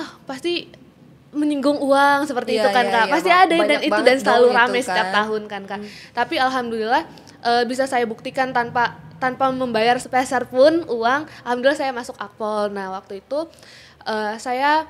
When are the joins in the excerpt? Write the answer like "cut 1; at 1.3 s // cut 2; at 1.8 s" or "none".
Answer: none